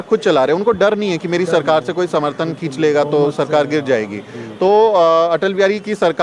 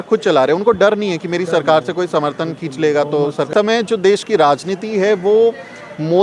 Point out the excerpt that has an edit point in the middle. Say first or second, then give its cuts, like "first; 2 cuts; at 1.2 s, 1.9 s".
second; 1 cut; at 3.5 s